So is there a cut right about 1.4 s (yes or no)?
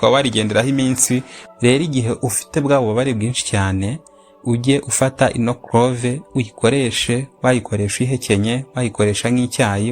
yes